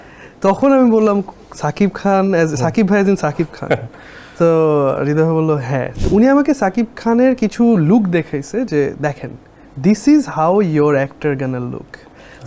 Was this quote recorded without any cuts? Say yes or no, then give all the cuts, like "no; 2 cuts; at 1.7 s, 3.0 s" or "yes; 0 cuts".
no; 1 cut; at 5.9 s